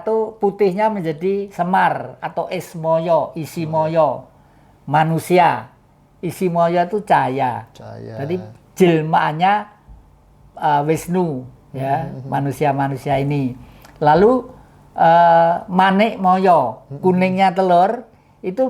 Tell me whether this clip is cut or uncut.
uncut